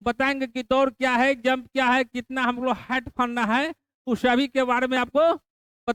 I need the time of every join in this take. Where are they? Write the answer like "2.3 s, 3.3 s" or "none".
none